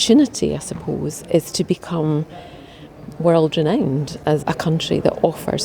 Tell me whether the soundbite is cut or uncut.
cut